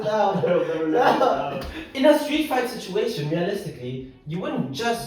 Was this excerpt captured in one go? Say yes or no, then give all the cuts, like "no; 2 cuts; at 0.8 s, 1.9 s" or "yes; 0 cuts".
no; 1 cut; at 1.9 s